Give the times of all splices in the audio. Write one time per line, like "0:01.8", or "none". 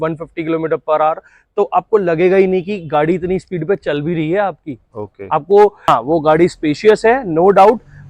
0:05.9